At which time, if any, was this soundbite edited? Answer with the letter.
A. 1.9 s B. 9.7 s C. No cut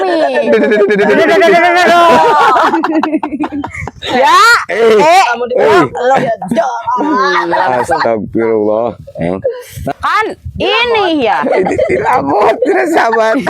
B